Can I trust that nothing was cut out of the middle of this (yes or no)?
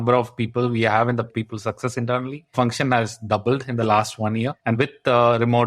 no